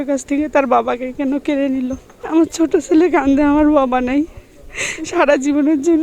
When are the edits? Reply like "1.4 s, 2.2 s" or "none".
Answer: 2.1 s